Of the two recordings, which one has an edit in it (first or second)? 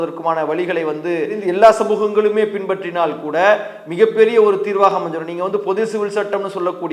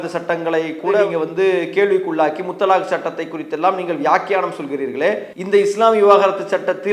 second